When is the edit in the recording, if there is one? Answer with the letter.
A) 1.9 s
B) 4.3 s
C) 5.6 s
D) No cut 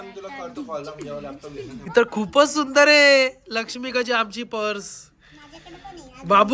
A